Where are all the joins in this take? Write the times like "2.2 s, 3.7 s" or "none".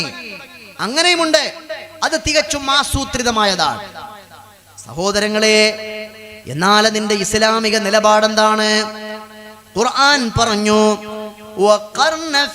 none